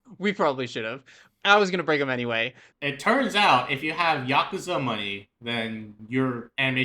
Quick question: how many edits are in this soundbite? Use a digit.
1